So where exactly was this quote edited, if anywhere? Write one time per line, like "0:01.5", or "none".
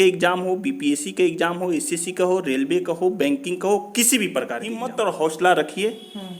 0:04.9